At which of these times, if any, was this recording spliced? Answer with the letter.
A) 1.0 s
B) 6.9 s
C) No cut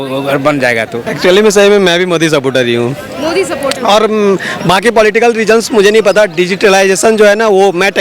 A